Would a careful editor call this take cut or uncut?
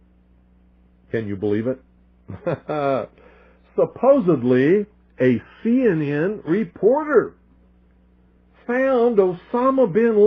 uncut